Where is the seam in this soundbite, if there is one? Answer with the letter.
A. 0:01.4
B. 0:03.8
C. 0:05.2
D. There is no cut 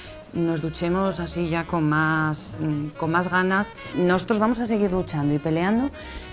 B